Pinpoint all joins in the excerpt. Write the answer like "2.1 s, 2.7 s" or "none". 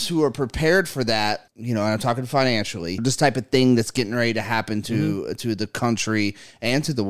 1.5 s, 3.0 s